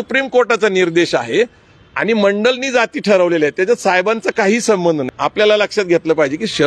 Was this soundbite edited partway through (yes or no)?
yes